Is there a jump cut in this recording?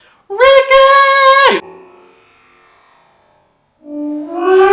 no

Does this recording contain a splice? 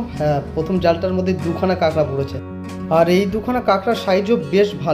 no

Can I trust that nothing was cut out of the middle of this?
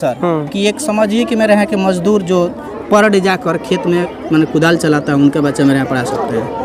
yes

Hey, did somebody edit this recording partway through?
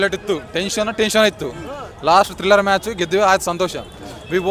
no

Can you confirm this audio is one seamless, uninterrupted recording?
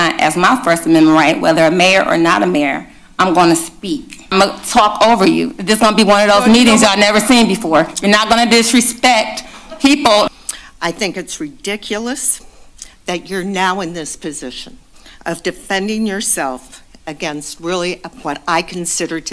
no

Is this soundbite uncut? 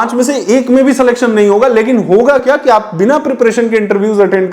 no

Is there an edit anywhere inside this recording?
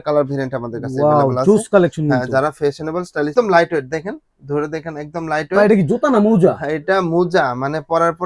yes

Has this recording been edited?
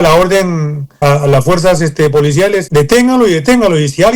yes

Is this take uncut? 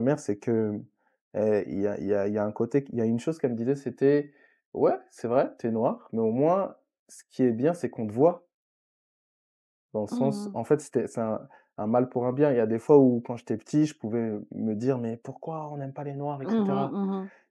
yes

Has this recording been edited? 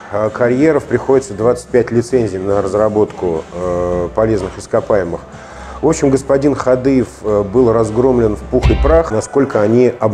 yes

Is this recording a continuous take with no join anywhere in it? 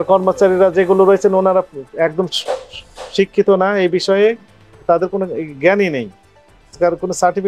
yes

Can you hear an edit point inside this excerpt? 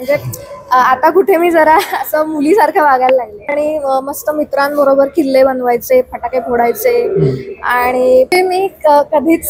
yes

